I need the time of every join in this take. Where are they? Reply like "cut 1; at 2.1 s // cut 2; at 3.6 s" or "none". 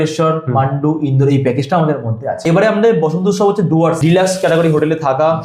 cut 1; at 2.4 s // cut 2; at 4.0 s